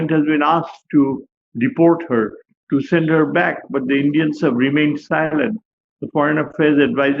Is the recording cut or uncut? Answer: uncut